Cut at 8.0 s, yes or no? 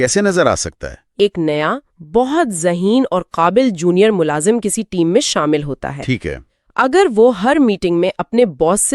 no